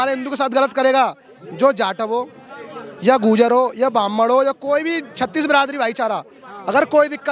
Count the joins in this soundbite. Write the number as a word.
zero